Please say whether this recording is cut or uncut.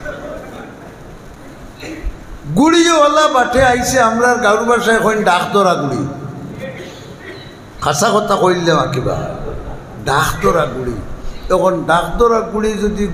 cut